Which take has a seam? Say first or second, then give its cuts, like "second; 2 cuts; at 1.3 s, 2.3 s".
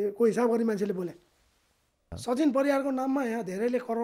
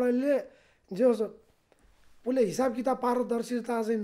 first; 1 cut; at 2.1 s